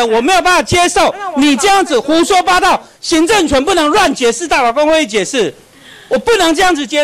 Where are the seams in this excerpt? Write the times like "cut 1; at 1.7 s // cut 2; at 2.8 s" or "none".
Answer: none